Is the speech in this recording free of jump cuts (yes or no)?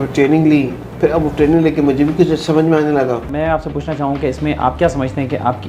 no